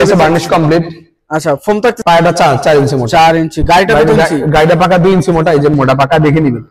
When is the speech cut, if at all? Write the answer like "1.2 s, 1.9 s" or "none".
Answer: 2.0 s, 5.7 s